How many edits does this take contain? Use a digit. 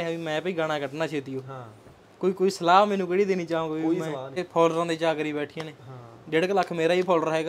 1